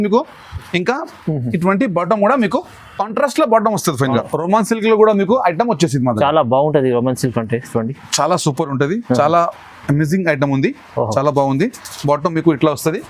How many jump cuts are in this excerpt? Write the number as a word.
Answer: one